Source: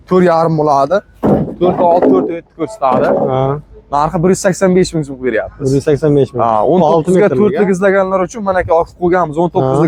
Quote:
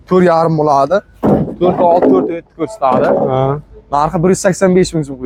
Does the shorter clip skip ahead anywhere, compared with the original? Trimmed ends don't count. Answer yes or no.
no